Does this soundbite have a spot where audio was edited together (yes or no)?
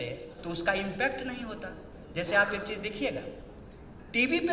no